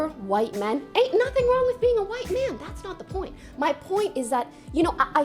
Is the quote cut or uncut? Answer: cut